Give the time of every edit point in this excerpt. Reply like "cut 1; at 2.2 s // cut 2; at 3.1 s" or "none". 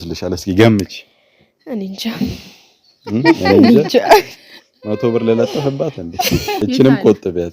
cut 1; at 6.6 s